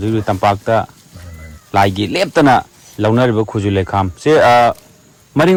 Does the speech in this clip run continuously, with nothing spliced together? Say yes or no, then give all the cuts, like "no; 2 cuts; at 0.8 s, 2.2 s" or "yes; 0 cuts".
yes; 0 cuts